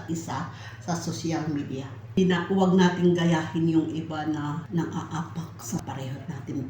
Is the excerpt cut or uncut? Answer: cut